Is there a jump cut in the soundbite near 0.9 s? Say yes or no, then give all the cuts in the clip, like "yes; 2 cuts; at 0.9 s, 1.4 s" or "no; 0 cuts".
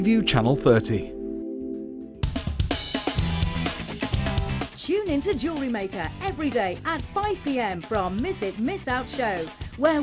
no; 1 cut; at 2.1 s